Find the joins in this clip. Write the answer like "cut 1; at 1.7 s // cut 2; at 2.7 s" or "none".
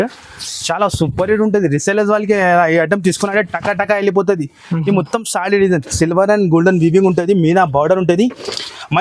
none